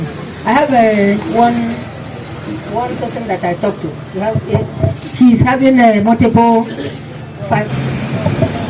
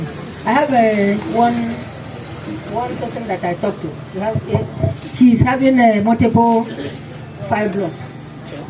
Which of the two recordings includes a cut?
first; 1 cut; at 7.6 s

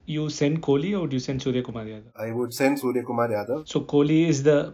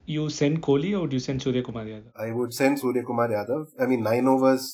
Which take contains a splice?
first; 1 cut; at 3.6 s

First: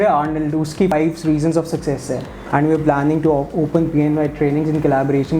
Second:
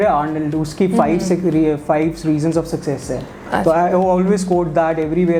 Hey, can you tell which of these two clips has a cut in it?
first; 2 cuts; at 0.9 s, 2.3 s

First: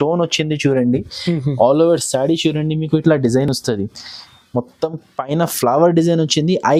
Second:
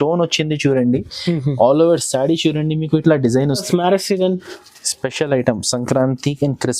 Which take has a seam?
second; 1 cut; at 3.6 s

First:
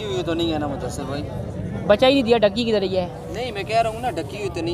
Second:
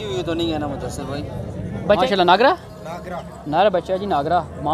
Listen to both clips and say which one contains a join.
second; 1 cut; at 2.0 s

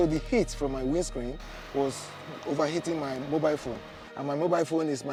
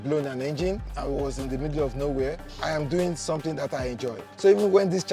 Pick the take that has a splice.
second; 3 cuts; at 0.9 s, 2.5 s, 4.3 s

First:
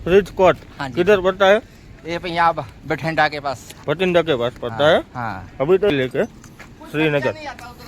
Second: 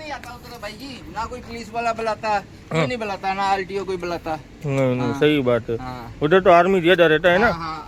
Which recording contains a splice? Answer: first; 1 cut; at 5.9 s

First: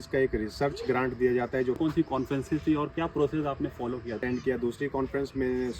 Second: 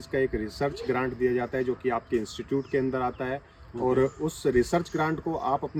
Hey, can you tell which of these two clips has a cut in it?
first; 2 cuts; at 1.8 s, 4.2 s

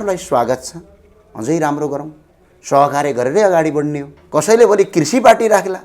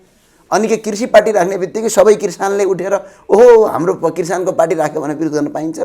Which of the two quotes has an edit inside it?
first; 1 cut; at 4.1 s

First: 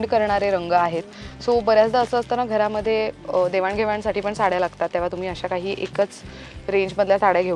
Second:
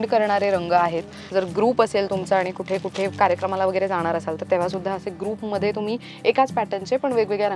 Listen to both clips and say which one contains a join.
second; 1 cut; at 1.1 s

